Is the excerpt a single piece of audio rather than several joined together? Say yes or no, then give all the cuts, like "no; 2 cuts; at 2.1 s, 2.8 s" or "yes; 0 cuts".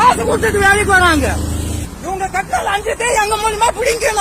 no; 1 cut; at 1.8 s